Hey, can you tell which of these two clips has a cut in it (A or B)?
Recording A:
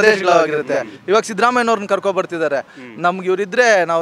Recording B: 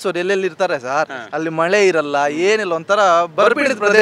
A